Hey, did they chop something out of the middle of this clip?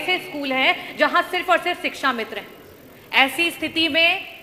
no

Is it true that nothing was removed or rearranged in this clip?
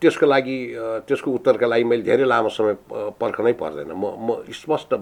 yes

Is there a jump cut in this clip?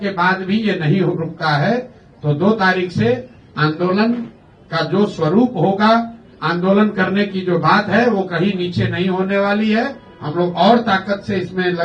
no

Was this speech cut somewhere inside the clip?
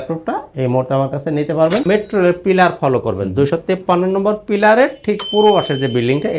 yes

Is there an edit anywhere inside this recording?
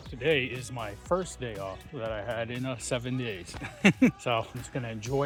no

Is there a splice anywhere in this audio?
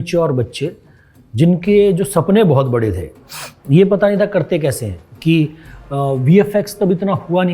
no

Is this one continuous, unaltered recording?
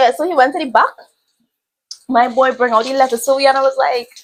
yes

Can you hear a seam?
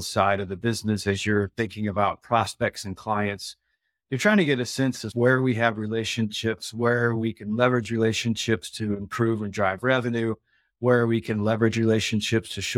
no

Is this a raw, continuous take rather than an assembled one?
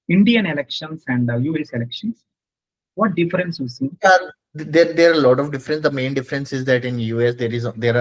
yes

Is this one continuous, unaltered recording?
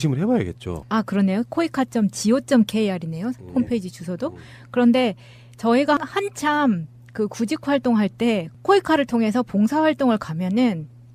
yes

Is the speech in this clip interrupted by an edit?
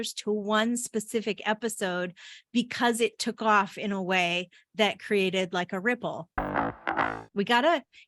yes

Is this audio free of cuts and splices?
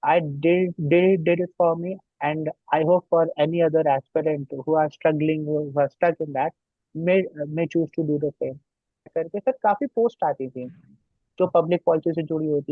no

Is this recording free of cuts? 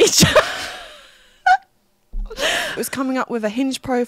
no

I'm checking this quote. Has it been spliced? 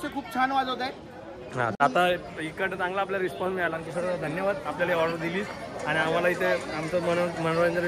no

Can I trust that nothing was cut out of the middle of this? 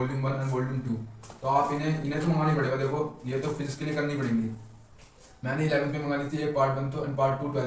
yes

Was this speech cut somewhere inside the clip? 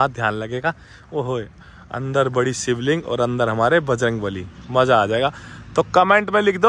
no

